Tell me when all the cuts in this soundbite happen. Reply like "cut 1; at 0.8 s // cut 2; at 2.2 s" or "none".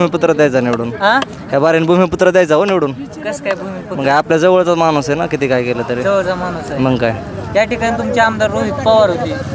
none